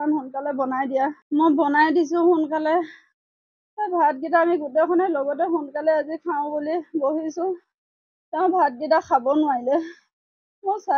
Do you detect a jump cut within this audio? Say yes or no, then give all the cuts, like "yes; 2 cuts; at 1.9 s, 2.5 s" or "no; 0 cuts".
yes; 1 cut; at 1.2 s